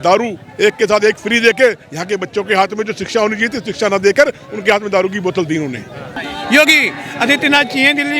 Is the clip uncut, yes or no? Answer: no